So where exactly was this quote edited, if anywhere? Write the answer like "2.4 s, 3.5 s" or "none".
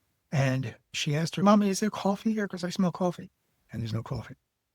1.4 s